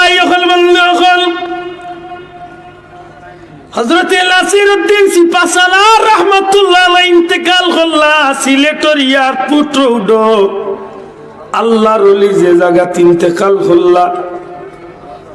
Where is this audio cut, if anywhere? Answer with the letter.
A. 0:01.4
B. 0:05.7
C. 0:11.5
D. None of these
A